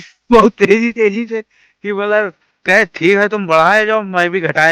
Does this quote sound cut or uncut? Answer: uncut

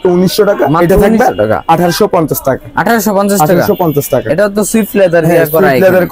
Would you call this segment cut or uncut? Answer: uncut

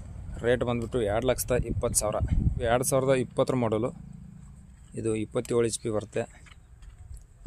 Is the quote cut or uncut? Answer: cut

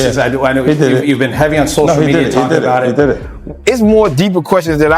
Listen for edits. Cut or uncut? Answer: cut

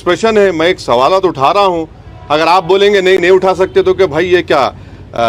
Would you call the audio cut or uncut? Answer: uncut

